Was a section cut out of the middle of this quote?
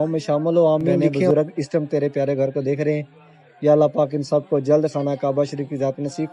yes; 1 cut; at 1.3 s

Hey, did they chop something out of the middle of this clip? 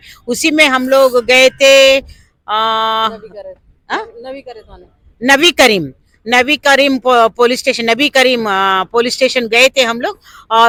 no; 0 cuts

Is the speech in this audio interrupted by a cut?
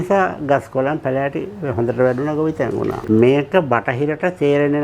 yes; 1 cut; at 3.0 s

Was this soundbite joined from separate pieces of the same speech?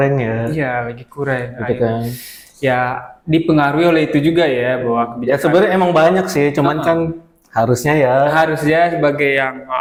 no; 0 cuts

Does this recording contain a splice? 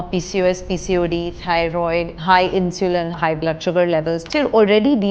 yes; 3 cuts; at 2.1 s, 3.1 s, 4.2 s

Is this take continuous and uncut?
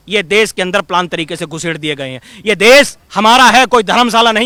yes; 0 cuts

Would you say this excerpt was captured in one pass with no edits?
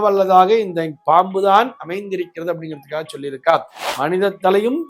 no; 1 cut; at 3.8 s

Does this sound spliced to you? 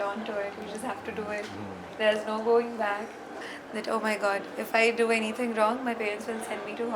yes; 1 cut; at 3.3 s

